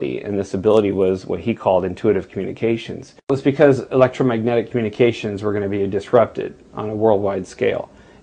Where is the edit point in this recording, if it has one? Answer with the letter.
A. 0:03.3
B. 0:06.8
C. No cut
A